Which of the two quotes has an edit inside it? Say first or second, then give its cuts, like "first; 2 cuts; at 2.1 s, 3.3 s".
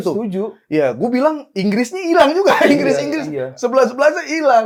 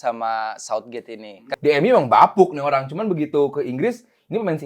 second; 1 cut; at 1.5 s